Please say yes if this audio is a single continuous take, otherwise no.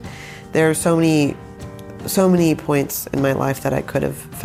yes